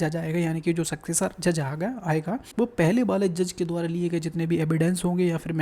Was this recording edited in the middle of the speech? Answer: yes; 1 cut; at 2.5 s

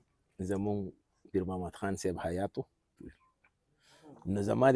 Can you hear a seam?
yes; 1 cut; at 2.9 s

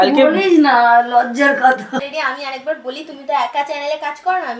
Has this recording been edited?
yes; 1 cut; at 2.0 s

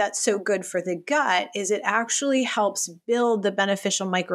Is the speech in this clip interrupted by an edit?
no; 0 cuts

